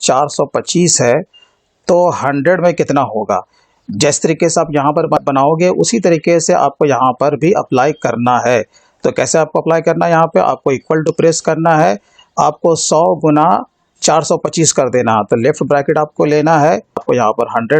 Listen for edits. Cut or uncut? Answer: uncut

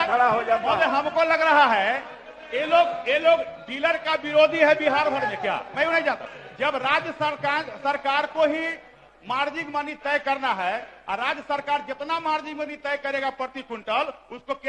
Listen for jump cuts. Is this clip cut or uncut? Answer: cut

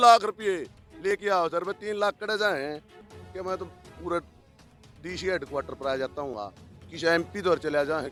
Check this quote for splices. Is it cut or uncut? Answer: uncut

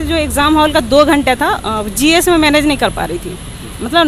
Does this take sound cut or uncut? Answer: uncut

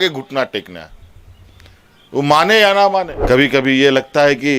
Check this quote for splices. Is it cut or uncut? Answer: cut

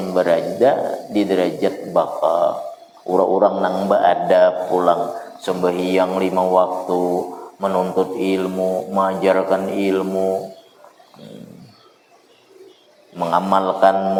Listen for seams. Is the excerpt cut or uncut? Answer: uncut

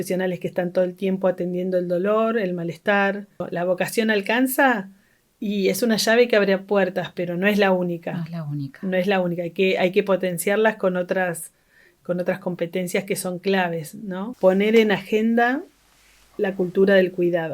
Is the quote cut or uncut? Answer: cut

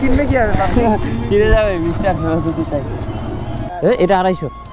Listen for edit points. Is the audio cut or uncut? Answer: cut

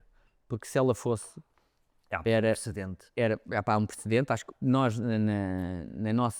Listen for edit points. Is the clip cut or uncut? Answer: uncut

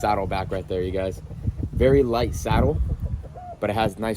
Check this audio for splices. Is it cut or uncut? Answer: uncut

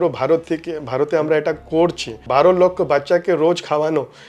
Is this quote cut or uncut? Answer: cut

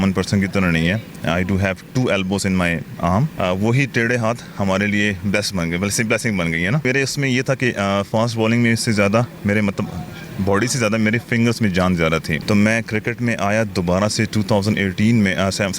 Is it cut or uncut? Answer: cut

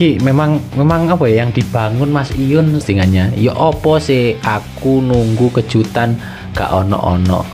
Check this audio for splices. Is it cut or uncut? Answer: cut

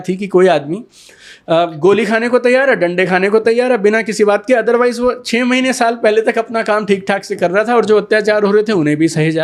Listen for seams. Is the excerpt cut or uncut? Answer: uncut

